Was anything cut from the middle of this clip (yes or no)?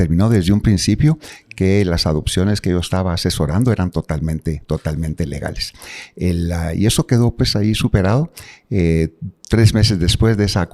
no